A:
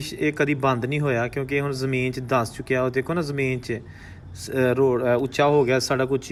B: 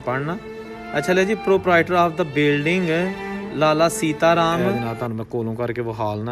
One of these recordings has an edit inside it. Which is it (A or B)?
B